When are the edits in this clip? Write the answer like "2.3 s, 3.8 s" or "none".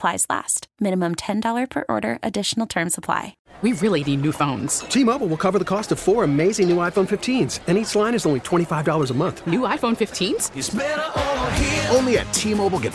3.4 s